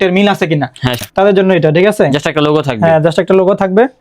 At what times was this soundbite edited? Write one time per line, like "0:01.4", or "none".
0:01.0